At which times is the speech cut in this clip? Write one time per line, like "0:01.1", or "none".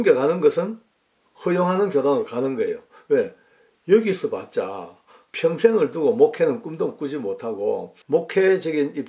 0:07.9